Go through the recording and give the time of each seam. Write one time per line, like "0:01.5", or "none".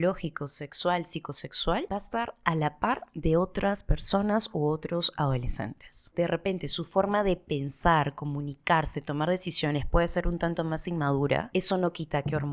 0:01.9
0:06.1
0:11.5